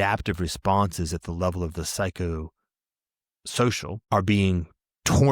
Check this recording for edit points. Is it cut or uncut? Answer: cut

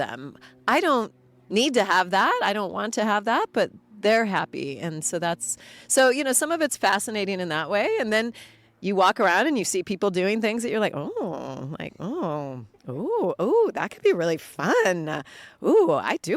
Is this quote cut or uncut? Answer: uncut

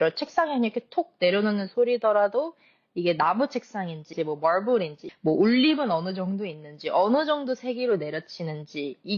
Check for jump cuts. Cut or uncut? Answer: cut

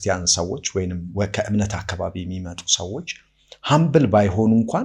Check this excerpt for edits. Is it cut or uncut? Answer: uncut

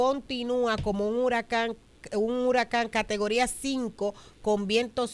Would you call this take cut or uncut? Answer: uncut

